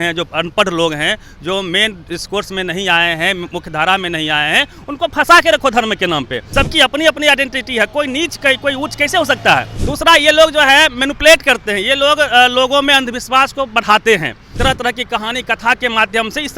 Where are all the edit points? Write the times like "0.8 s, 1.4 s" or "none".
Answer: 6.4 s, 9.8 s, 14.4 s

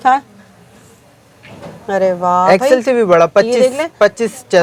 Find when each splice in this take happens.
none

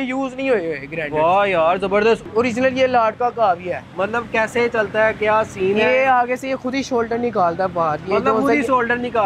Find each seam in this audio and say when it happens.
2.2 s

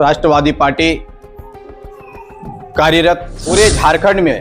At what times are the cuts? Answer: 1.2 s, 2.4 s, 3.5 s

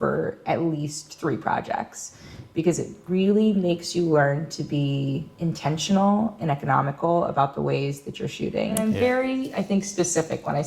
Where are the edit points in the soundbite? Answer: 8.8 s

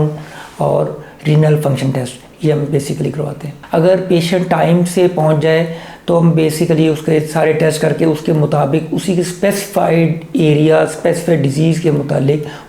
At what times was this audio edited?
3.6 s

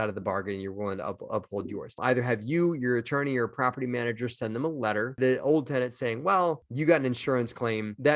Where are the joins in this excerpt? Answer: 2.0 s, 5.1 s, 6.6 s

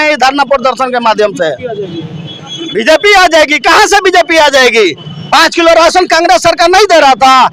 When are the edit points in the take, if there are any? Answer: none

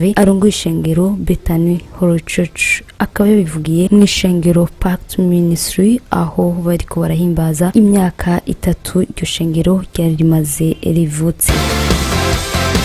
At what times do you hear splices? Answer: 11.5 s

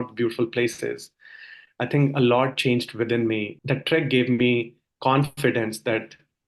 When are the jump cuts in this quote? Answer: 3.5 s

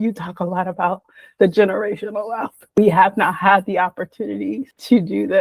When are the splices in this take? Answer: 2.8 s

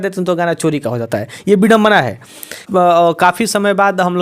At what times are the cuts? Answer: 2.6 s

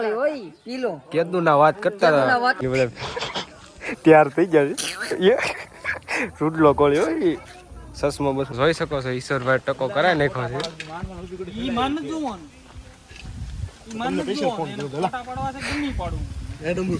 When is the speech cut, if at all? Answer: 2.6 s, 8.5 s

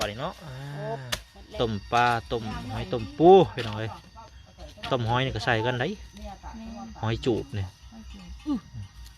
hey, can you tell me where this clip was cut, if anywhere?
1.5 s

